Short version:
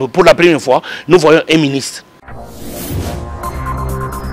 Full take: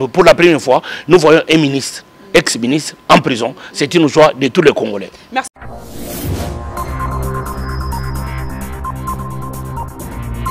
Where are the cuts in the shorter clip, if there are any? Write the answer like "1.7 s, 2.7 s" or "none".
2.2 s